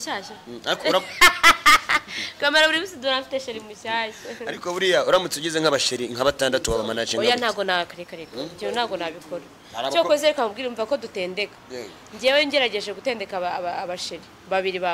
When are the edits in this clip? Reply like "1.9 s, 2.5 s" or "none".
none